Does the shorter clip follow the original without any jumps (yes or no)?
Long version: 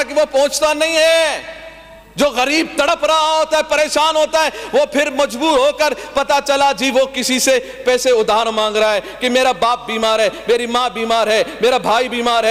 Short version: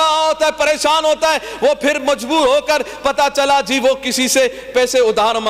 yes